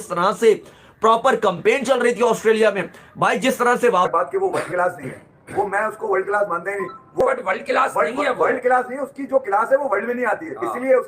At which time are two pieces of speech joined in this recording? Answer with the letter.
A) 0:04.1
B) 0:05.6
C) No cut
A